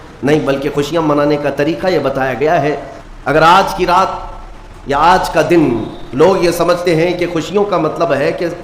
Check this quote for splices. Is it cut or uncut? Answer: cut